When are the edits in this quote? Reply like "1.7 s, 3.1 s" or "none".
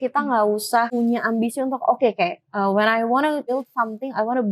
0.9 s, 3.5 s